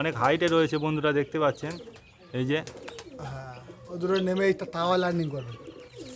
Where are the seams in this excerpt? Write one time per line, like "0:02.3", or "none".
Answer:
none